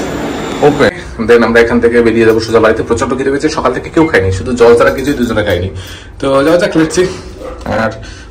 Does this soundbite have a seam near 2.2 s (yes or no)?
no